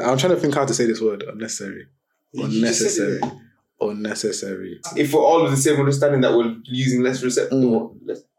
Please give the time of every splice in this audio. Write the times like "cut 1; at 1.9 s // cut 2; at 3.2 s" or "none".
cut 1; at 4.9 s